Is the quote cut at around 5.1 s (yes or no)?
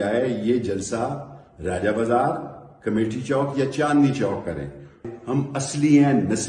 yes